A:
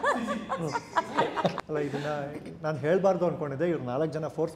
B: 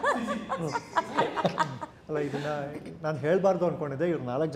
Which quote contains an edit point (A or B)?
A